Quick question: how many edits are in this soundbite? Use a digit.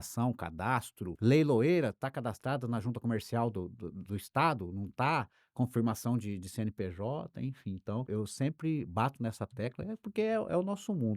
2